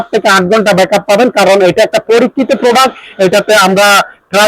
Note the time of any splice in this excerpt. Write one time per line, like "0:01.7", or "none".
none